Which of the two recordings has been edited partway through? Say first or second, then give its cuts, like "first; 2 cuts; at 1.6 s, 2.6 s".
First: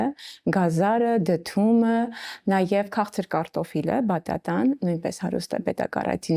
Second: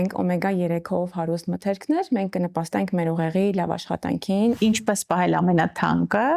second; 1 cut; at 4.6 s